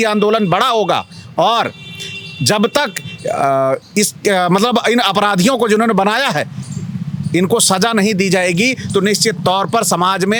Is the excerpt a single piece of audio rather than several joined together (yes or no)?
yes